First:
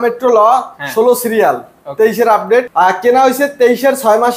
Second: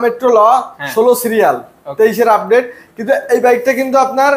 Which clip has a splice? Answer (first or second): first